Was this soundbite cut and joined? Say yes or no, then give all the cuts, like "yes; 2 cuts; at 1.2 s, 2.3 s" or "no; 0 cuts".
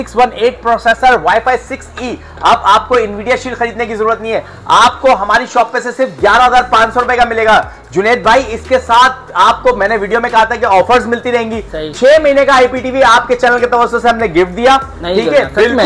no; 0 cuts